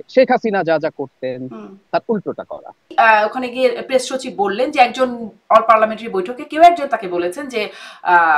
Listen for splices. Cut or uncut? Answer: cut